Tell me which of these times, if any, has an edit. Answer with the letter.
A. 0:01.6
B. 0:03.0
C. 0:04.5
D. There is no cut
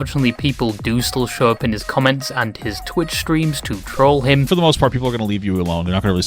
C